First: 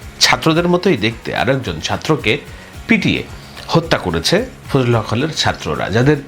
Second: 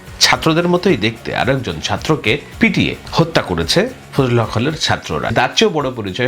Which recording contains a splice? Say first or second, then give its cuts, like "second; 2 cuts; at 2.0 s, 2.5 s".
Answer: second; 2 cuts; at 2.7 s, 5.3 s